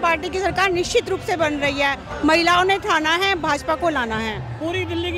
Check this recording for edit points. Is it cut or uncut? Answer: uncut